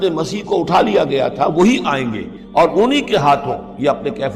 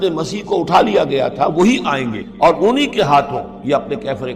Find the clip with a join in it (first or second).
second